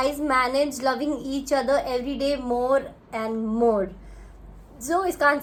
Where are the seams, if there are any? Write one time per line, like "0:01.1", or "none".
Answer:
none